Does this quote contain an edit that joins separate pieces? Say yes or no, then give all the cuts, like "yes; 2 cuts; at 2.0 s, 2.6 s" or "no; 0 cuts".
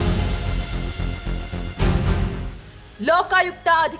yes; 1 cut; at 2.9 s